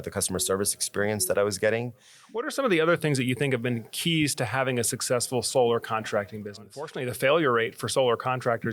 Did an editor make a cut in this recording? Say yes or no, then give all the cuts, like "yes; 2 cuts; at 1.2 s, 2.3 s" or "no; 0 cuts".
yes; 2 cuts; at 2.5 s, 7.0 s